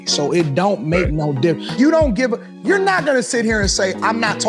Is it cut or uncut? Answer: cut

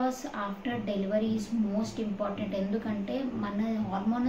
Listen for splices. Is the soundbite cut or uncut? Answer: uncut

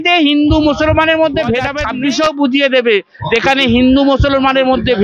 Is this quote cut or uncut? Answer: cut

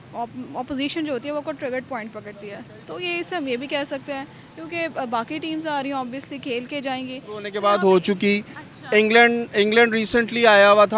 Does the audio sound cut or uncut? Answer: cut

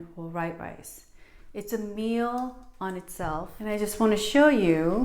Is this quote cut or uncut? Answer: cut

